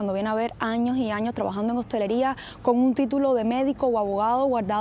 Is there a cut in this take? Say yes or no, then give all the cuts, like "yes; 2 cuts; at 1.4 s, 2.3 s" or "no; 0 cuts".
no; 0 cuts